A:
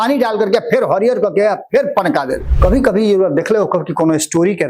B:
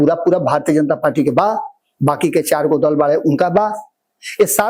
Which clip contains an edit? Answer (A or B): A